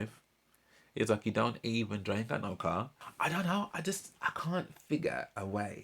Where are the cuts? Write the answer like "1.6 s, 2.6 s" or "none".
3.0 s